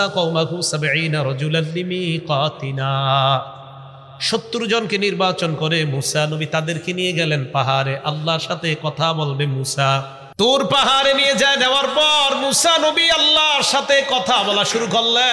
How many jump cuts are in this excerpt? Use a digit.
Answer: 1